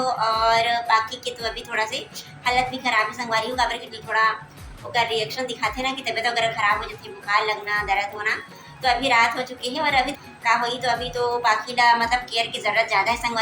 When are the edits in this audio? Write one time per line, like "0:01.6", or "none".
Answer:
0:03.9
0:10.2

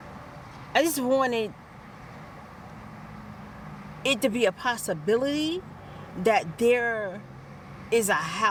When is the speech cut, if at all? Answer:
none

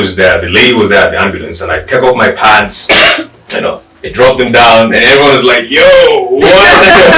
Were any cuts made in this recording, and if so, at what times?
none

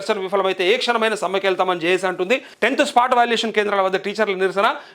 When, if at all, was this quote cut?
0:02.5

